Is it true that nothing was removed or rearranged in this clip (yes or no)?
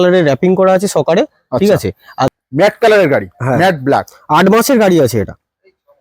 no